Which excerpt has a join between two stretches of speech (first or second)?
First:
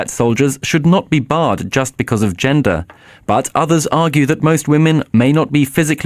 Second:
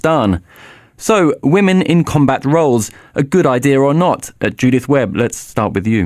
second